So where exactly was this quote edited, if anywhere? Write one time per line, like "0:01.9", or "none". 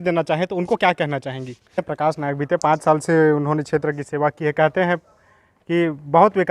0:01.8